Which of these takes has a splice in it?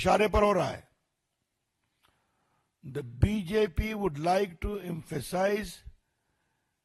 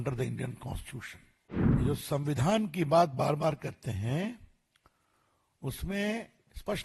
second; 1 cut; at 1.8 s

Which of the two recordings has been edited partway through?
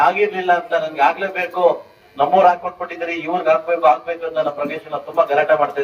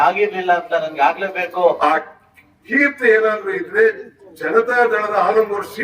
second; 1 cut; at 1.8 s

